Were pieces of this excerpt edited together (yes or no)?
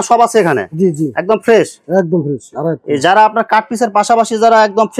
no